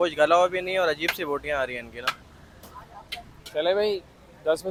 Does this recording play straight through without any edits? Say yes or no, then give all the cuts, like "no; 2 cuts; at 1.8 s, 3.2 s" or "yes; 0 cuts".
yes; 0 cuts